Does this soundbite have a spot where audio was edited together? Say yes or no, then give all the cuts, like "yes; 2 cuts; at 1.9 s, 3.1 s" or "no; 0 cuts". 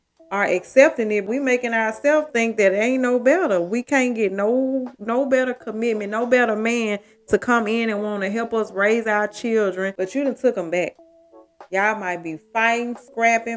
yes; 2 cuts; at 1.2 s, 9.9 s